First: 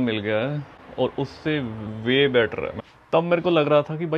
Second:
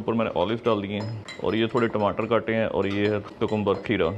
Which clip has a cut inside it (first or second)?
first